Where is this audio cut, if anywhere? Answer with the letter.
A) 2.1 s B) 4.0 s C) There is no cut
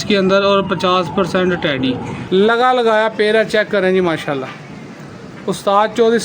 A